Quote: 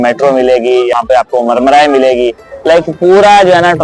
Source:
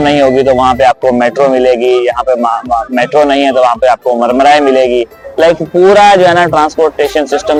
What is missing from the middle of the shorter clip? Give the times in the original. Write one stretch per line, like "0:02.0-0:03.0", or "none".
0:02.2-0:03.7

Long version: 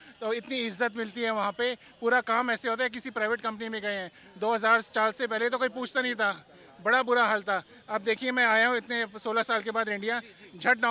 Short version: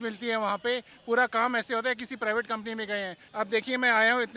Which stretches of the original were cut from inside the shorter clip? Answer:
0:04.2-0:07.8

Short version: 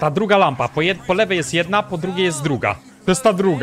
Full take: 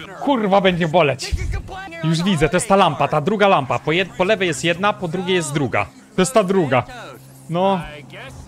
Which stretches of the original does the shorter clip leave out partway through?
none

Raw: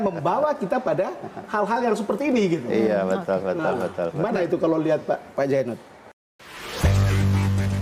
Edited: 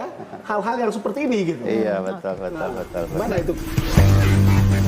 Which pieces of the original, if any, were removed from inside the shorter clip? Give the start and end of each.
0:04.6-0:06.4

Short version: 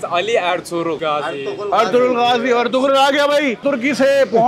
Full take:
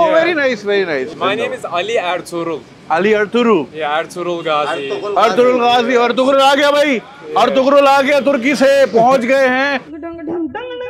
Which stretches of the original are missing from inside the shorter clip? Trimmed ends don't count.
0:02.6-0:04.4
0:07.1-0:08.2

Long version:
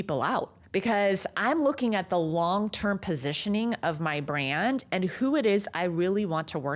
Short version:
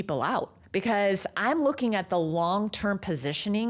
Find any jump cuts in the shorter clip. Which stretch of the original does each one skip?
none

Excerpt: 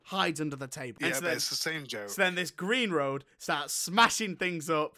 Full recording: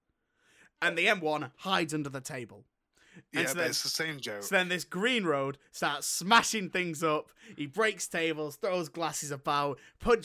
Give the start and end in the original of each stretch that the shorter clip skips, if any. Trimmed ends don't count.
0:02.5-0:03.3

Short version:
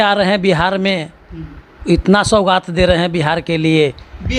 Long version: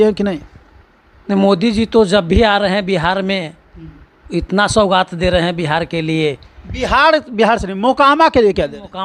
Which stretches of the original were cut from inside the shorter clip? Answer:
none

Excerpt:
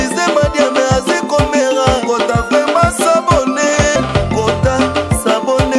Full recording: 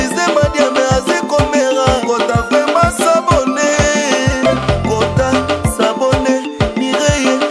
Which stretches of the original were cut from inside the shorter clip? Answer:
0:04.0-0:04.5

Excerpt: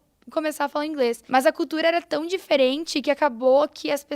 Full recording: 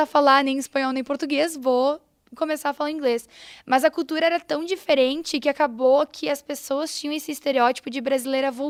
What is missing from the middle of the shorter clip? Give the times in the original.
0:03.3-0:03.6

